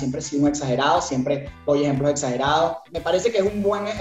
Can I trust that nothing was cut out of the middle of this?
no; 1 cut; at 2.9 s

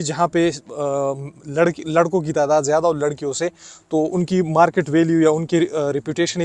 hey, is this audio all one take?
yes; 0 cuts

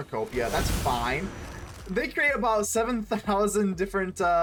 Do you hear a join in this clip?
no; 0 cuts

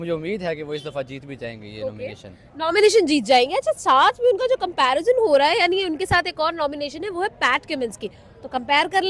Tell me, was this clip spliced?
no; 0 cuts

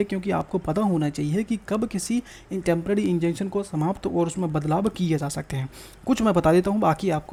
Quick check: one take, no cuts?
yes; 0 cuts

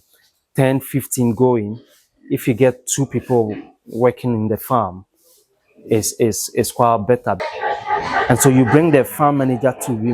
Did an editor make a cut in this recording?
yes; 1 cut; at 7.4 s

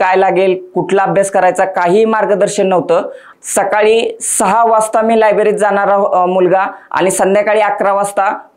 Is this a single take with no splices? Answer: no; 1 cut; at 3.2 s

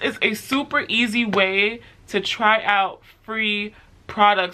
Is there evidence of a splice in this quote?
no; 0 cuts

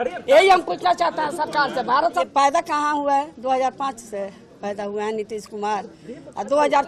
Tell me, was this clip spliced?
yes; 1 cut; at 2.2 s

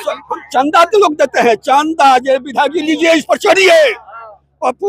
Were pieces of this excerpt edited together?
no; 0 cuts

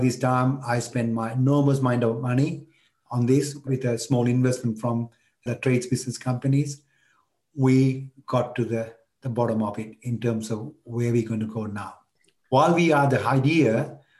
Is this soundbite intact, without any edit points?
no; 1 cut; at 12.2 s

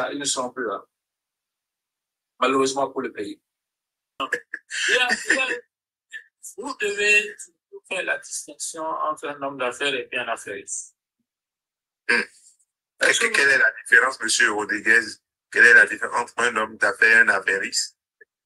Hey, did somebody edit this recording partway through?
yes; 1 cut; at 4.2 s

